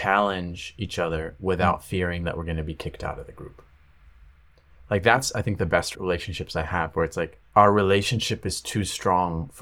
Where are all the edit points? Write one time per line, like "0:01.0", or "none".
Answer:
0:05.9
0:07.4